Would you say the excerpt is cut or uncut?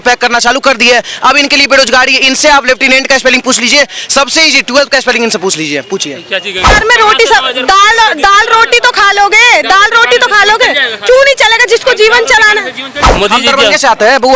cut